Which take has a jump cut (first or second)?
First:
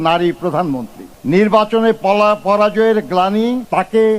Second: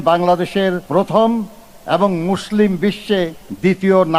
first